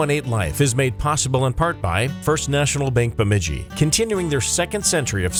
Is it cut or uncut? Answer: uncut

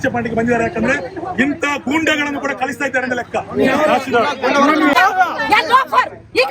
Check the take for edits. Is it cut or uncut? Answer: cut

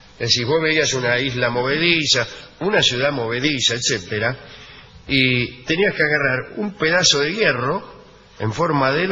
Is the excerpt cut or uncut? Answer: cut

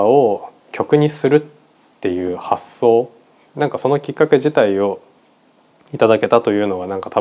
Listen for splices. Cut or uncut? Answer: uncut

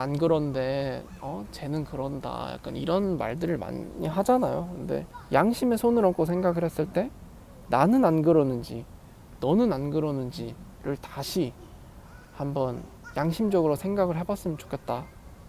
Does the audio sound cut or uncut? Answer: uncut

